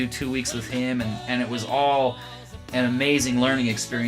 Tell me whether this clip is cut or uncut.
cut